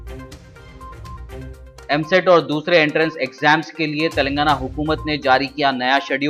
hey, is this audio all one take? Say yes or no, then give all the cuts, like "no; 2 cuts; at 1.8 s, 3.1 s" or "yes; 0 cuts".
yes; 0 cuts